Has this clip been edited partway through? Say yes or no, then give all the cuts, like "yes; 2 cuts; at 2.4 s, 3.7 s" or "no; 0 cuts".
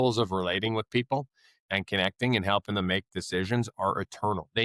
no; 0 cuts